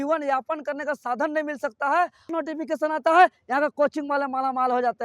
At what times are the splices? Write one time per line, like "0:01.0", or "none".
0:02.3